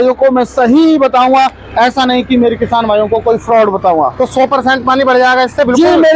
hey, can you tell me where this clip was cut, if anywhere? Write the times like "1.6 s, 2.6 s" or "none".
none

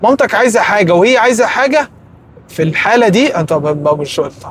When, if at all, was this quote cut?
none

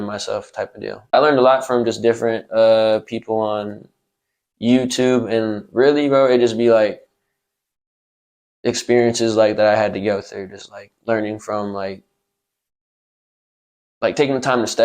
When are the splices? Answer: 1.1 s

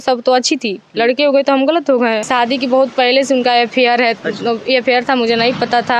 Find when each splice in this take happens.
2.2 s

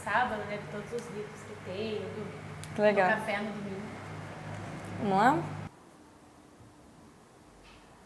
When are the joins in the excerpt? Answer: 5.6 s

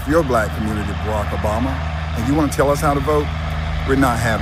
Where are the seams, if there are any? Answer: none

